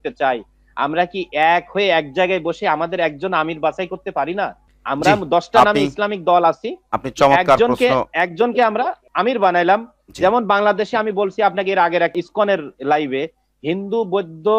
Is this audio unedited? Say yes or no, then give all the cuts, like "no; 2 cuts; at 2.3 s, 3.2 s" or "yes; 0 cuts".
yes; 0 cuts